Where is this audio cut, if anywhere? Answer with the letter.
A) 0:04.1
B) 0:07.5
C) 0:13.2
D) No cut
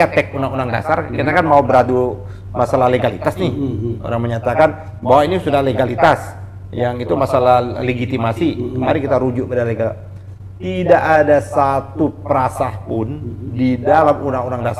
D